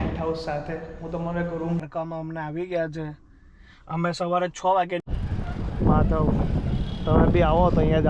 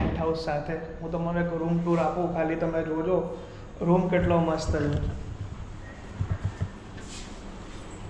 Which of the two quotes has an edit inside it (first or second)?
first